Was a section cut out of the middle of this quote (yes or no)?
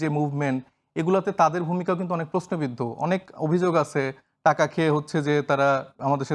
no